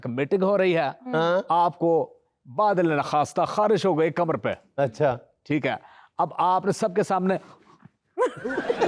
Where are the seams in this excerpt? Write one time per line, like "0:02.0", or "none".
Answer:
none

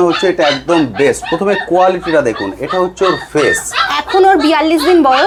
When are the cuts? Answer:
none

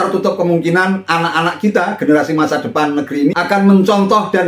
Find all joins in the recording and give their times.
0:03.3

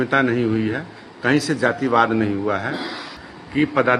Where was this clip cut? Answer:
0:03.1

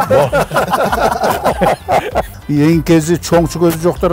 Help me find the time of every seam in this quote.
0:02.2

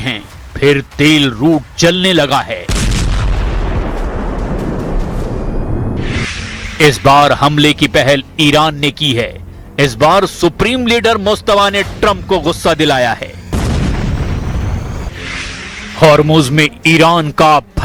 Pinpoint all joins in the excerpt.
none

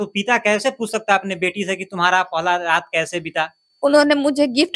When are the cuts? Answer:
0:03.6

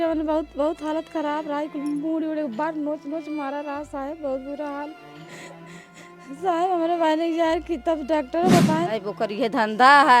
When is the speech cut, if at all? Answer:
0:08.9

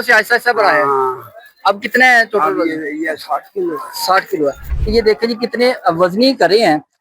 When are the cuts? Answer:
0:04.7

